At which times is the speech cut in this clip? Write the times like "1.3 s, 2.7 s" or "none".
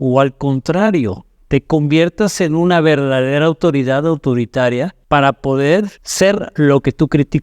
5.0 s, 6.0 s